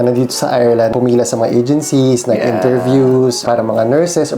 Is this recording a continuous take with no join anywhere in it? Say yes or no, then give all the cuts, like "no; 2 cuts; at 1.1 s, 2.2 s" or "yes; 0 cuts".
no; 2 cuts; at 0.9 s, 3.4 s